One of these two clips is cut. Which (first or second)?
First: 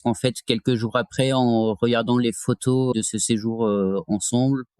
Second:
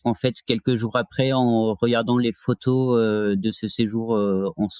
first